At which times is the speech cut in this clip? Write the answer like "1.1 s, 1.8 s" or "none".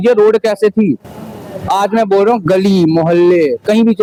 none